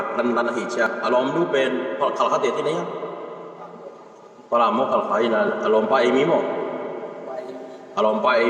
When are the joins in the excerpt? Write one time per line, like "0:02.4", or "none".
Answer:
0:00.9